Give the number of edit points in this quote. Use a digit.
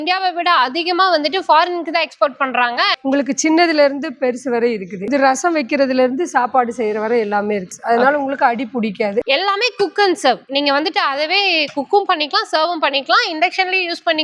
4